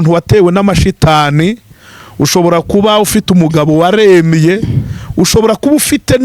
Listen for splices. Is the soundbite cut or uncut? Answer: uncut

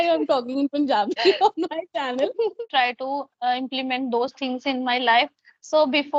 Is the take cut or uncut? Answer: cut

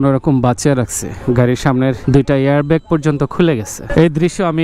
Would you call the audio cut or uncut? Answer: cut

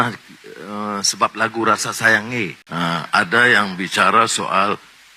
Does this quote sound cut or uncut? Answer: cut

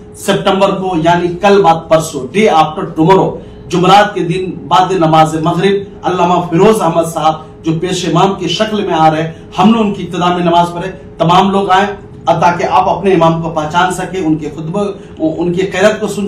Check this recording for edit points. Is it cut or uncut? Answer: uncut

